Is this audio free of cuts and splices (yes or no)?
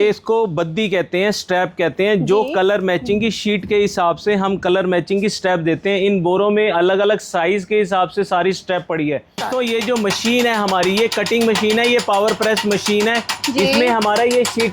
no